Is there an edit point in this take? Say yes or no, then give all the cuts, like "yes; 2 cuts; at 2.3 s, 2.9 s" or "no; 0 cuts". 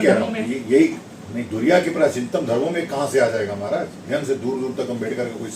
yes; 1 cut; at 4.1 s